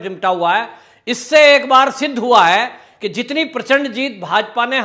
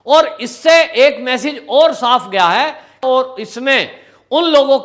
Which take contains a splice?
second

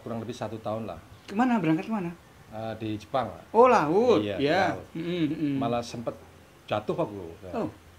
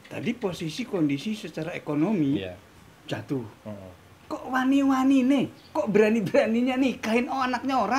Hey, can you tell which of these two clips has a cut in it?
first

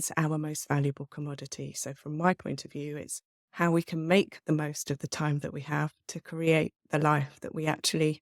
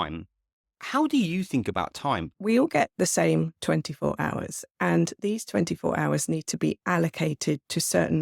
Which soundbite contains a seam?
second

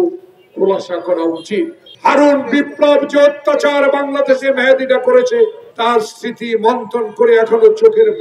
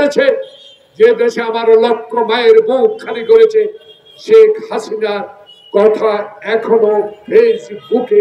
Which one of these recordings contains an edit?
first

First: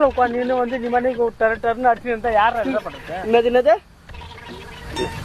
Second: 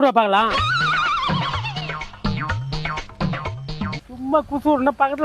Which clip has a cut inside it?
second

